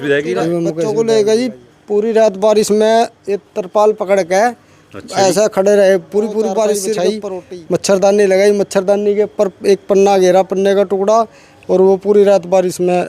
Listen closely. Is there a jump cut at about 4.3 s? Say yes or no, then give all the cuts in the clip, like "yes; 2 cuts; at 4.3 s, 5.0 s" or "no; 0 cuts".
no; 2 cuts; at 0.8 s, 7.1 s